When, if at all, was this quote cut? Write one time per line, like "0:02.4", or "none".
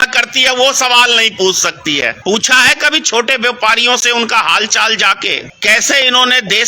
0:02.2
0:05.5